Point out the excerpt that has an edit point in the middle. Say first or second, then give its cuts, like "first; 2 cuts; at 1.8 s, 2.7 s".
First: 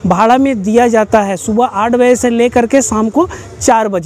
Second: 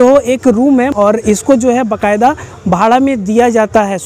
second; 1 cut; at 0.9 s